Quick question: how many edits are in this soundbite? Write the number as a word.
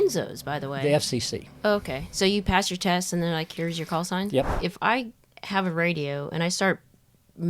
one